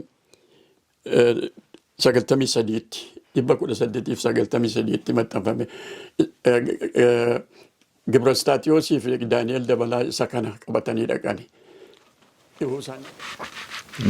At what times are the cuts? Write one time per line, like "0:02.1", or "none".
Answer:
0:13.0